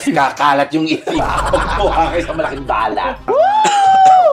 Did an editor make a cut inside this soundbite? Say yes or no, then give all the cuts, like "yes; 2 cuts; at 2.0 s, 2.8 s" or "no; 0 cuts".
yes; 1 cut; at 3.3 s